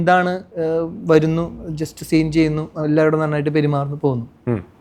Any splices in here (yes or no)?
no